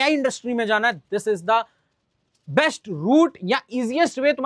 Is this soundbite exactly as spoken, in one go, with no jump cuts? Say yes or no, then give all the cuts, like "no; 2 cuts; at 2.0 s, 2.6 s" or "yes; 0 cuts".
yes; 0 cuts